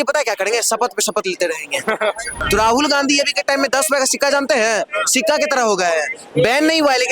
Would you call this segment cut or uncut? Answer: cut